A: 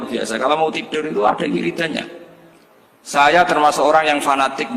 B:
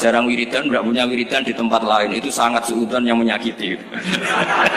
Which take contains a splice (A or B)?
A